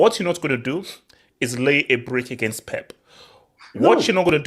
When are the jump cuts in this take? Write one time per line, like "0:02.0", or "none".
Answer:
none